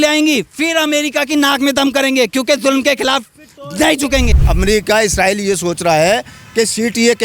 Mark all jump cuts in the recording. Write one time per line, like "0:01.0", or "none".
0:04.4